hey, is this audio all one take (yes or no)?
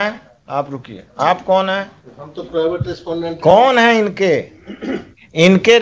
yes